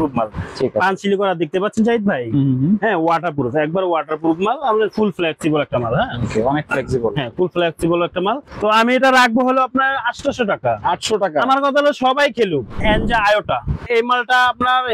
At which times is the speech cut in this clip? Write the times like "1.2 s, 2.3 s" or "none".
8.5 s, 12.8 s, 13.9 s